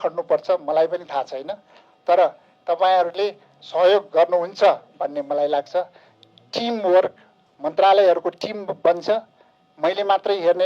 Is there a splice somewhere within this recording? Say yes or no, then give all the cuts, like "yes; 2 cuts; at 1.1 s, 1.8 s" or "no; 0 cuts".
no; 0 cuts